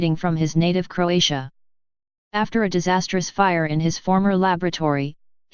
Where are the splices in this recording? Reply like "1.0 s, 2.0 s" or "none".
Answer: 3.3 s